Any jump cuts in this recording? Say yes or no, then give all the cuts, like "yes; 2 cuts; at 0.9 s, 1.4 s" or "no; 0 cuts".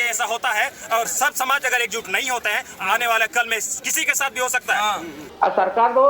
yes; 1 cut; at 5.2 s